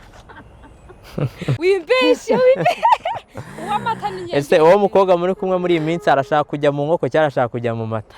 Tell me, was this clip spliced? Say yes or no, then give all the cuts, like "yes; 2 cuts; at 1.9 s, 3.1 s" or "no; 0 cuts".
yes; 1 cut; at 1.5 s